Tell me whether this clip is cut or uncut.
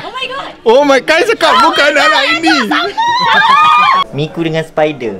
cut